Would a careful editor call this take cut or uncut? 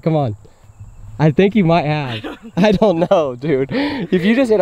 uncut